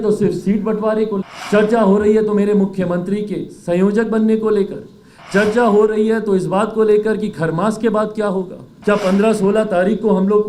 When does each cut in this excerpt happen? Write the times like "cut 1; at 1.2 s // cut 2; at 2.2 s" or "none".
cut 1; at 1.3 s // cut 2; at 8.6 s